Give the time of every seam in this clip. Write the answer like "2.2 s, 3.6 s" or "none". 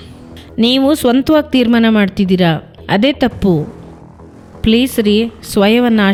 none